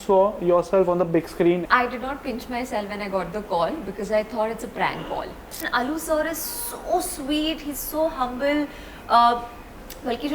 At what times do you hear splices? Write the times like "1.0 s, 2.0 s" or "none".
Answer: 1.6 s, 5.7 s